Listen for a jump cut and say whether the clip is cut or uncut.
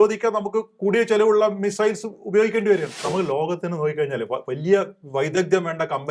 cut